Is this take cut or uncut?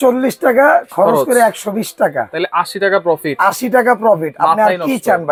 uncut